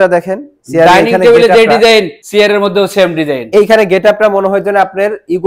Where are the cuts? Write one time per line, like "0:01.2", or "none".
0:02.2